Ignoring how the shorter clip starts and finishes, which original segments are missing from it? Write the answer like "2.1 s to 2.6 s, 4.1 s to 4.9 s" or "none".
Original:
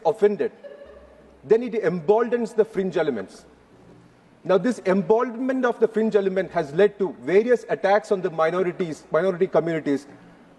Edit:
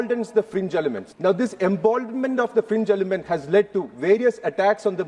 3.3 s to 4.3 s

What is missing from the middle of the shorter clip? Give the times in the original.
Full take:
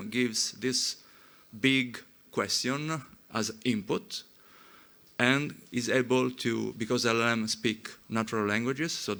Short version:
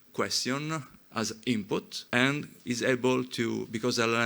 4.1 s to 5.0 s

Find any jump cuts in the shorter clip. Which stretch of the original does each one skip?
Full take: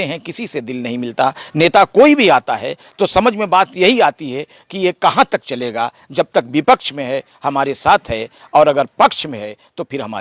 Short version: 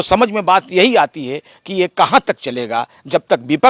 none

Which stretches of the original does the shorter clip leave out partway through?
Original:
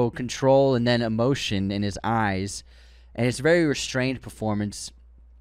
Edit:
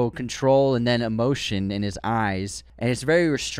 2.6 s to 3.0 s

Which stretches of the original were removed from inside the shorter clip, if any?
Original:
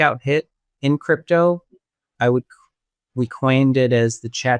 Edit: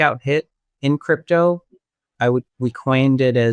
2.5 s to 3.1 s

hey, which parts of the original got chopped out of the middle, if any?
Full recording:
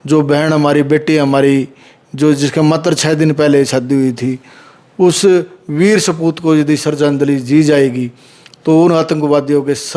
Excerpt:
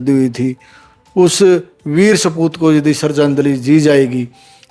none

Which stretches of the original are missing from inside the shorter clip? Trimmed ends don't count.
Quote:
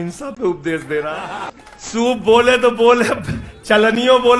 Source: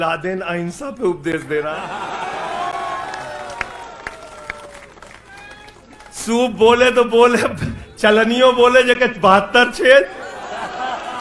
2.1 s to 5.8 s

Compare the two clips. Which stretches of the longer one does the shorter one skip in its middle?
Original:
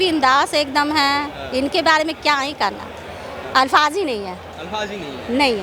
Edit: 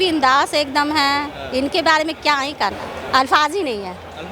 2.9 s to 3.3 s

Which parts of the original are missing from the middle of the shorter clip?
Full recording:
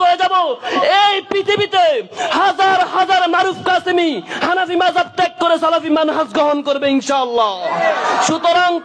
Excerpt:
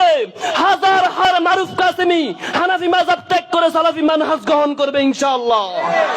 3.0 s to 3.1 s

